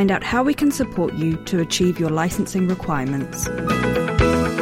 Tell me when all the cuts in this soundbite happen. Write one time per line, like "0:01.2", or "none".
0:03.4